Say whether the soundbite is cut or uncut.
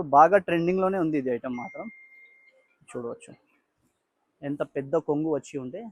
uncut